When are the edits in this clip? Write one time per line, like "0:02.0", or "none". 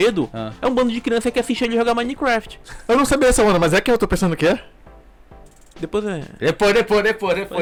none

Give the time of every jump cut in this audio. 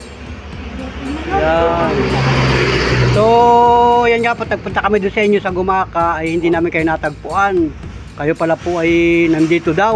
none

